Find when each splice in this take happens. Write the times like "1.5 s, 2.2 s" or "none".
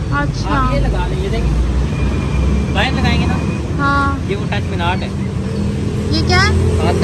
none